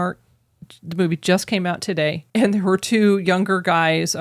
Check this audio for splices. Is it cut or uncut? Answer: cut